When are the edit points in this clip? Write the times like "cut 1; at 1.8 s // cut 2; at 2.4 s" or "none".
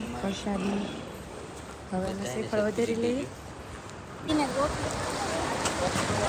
cut 1; at 4.3 s